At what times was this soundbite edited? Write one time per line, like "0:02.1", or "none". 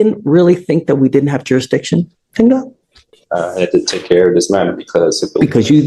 none